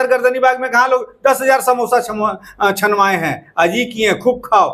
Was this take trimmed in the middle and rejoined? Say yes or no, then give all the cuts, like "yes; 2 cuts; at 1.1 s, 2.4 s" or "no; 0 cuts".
no; 0 cuts